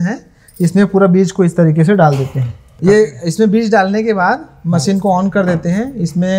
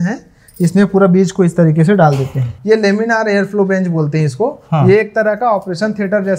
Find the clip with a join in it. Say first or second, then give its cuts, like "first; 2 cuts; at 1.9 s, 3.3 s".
second; 1 cut; at 2.6 s